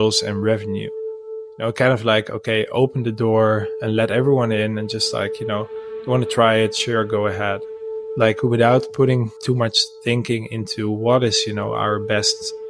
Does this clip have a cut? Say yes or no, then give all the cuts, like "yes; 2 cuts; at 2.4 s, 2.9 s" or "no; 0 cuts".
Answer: yes; 3 cuts; at 1.3 s, 7.8 s, 9.4 s